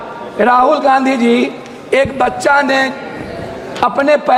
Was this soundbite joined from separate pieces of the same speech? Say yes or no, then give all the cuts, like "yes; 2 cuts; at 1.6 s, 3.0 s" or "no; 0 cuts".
no; 0 cuts